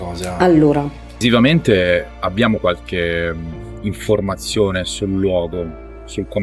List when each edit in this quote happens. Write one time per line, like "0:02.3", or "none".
0:01.2